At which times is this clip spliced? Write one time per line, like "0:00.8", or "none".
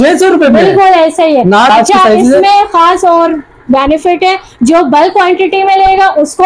0:01.7